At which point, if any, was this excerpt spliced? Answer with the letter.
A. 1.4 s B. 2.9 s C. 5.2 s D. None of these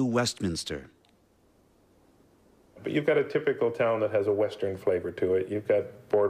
A